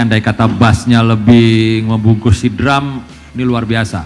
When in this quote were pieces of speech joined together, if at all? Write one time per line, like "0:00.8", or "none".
0:03.1